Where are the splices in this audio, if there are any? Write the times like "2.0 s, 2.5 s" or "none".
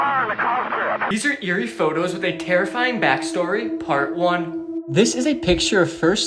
1.1 s